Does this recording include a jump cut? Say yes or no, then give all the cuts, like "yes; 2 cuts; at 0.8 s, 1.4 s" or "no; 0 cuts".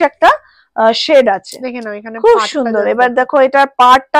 no; 0 cuts